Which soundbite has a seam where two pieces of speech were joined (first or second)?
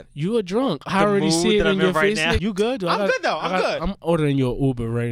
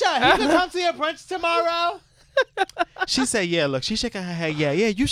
first